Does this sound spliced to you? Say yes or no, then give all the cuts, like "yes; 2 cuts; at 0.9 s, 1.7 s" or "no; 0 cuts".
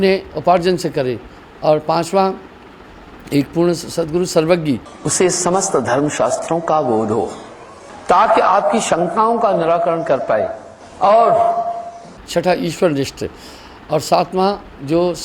no; 0 cuts